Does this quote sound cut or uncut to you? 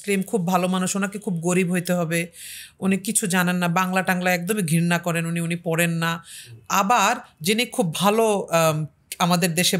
uncut